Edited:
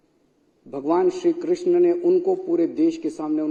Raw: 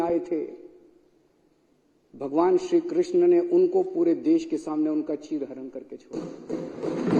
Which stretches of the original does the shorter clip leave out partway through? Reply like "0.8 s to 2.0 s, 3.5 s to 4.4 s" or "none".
none